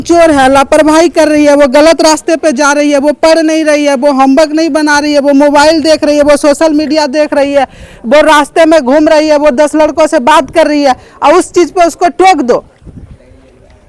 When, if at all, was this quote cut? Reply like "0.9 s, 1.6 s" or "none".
none